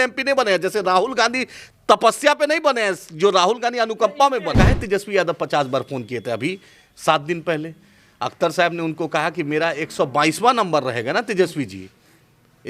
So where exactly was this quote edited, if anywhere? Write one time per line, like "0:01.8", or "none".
0:04.5